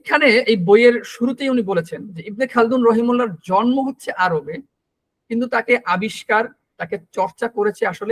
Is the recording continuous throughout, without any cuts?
yes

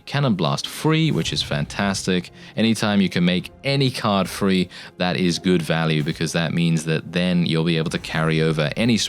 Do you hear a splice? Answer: no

